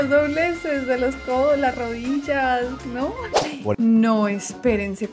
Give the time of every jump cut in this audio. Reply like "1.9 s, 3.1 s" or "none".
3.3 s